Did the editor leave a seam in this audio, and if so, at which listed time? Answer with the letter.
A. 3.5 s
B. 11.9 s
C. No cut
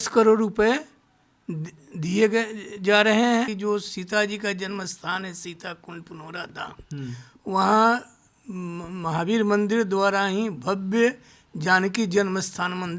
A